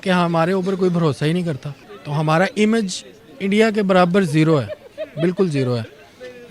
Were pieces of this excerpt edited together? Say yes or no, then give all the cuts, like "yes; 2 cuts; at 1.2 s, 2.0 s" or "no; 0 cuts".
no; 0 cuts